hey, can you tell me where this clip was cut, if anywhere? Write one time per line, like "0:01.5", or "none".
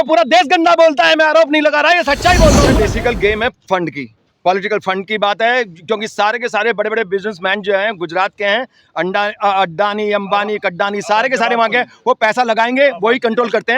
0:02.7